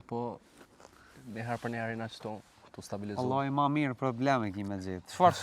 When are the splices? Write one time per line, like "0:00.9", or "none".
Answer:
none